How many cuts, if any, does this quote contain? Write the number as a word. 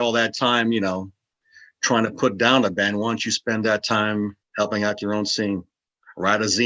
one